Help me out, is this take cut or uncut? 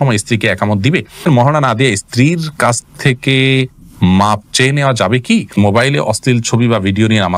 cut